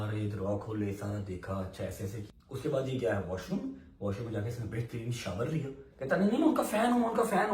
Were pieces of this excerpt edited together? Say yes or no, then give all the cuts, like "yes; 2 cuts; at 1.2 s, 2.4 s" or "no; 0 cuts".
yes; 2 cuts; at 2.2 s, 5.9 s